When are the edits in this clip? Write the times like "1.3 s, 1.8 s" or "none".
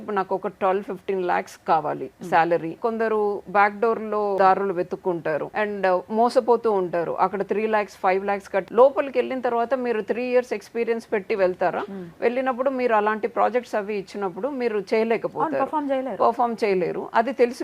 2.8 s, 4.4 s, 5.5 s, 8.7 s